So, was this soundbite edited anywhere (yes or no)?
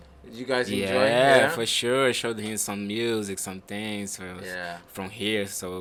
no